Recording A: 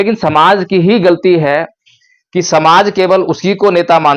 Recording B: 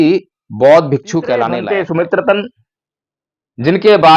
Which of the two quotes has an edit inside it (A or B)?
B